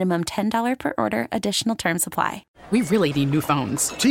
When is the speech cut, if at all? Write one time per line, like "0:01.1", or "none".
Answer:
0:02.5